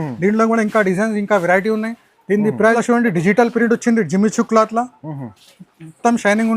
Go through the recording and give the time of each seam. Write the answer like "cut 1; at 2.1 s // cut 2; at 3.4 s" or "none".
cut 1; at 2.8 s